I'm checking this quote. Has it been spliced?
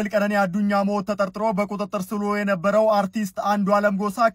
no; 0 cuts

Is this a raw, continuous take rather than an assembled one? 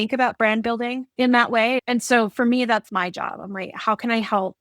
no; 2 cuts; at 1.0 s, 1.8 s

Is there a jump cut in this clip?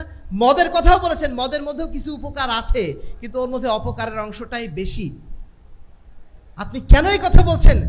no; 0 cuts

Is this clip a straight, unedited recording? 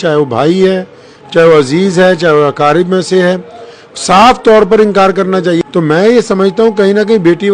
no; 1 cut; at 5.6 s

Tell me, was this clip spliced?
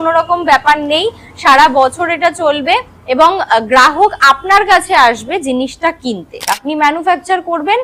yes; 1 cut; at 6.4 s

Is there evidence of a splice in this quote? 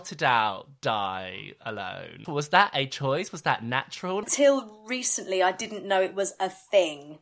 yes; 2 cuts; at 2.2 s, 4.2 s

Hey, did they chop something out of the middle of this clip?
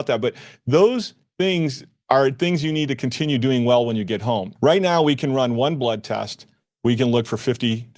yes; 1 cut; at 4.5 s

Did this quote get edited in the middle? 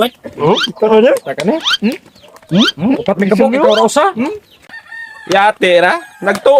no; 0 cuts

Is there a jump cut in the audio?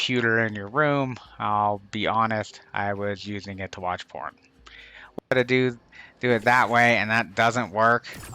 yes; 1 cut; at 5.3 s

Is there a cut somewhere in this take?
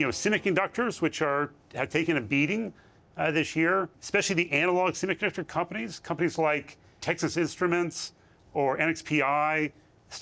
yes; 2 cuts; at 4.0 s, 7.0 s

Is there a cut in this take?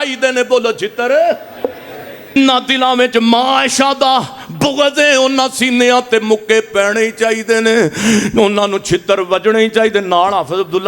yes; 1 cut; at 2.4 s

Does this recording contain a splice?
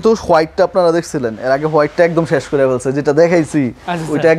no; 0 cuts

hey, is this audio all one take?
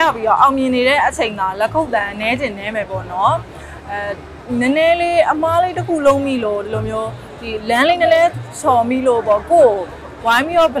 yes; 0 cuts

